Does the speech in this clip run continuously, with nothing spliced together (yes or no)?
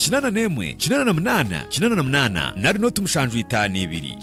yes